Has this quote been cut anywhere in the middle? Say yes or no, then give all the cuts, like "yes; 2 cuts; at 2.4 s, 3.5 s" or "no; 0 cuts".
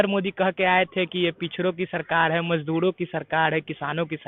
no; 0 cuts